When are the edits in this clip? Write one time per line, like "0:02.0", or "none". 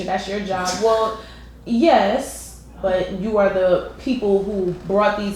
0:02.8